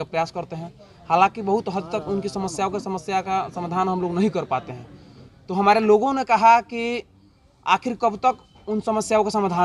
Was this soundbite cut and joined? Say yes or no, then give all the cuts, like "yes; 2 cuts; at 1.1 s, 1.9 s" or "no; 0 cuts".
no; 0 cuts